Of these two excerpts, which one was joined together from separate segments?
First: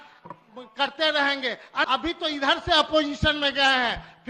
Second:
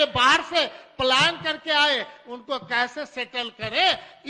first; 1 cut; at 1.9 s

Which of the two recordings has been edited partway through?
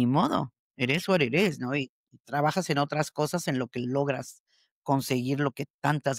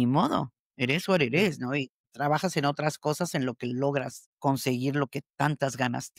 second; 2 cuts; at 2.0 s, 4.2 s

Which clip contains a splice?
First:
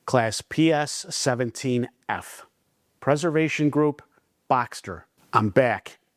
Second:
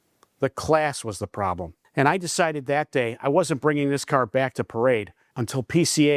first; 1 cut; at 5.1 s

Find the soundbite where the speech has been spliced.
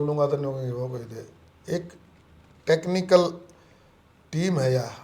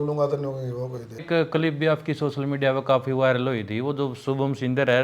second; 1 cut; at 1.2 s

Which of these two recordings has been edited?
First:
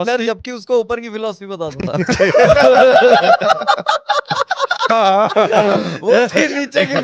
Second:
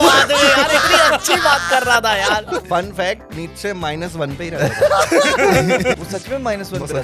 second; 2 cuts; at 2.6 s, 6.0 s

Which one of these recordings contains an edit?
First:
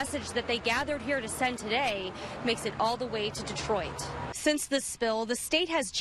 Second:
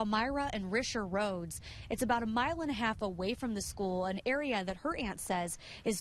first; 1 cut; at 4.2 s

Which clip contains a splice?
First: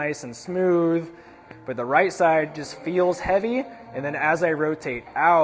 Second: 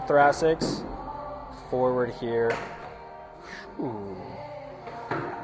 first; 1 cut; at 1.5 s

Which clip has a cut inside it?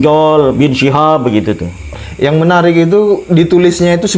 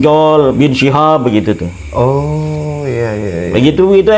first; 1 cut; at 1.8 s

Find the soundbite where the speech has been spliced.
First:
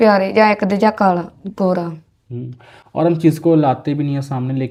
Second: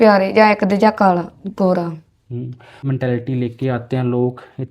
second; 1 cut; at 2.8 s

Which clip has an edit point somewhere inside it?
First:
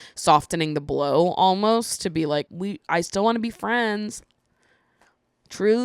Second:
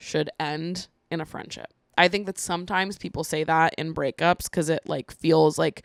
first; 1 cut; at 2.5 s

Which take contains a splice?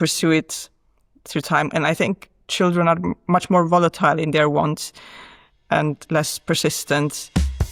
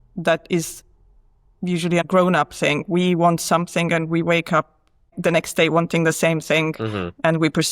second; 2 cuts; at 2.1 s, 5.2 s

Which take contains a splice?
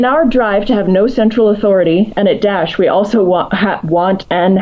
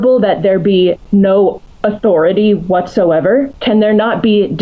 second; 3 cuts; at 1.0 s, 1.7 s, 3.6 s

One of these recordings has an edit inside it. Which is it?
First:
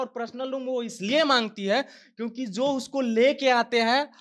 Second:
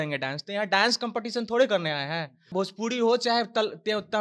second; 1 cut; at 2.5 s

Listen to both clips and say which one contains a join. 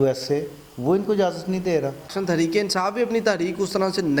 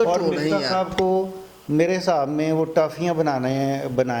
first; 1 cut; at 2.2 s

